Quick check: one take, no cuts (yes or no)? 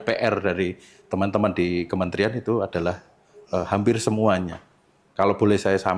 yes